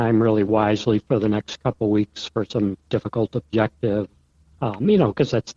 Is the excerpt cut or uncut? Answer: uncut